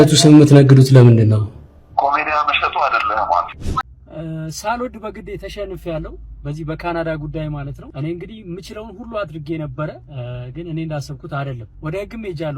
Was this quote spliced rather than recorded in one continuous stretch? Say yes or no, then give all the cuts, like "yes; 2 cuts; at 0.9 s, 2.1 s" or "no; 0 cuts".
yes; 1 cut; at 3.8 s